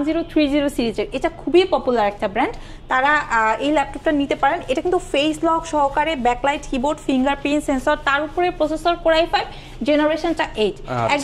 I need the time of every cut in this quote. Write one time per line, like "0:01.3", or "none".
none